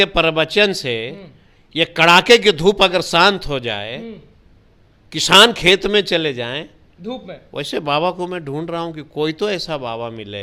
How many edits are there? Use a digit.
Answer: 0